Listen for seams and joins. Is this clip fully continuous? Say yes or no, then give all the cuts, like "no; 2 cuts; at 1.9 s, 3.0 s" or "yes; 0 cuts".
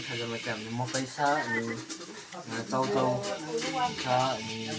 yes; 0 cuts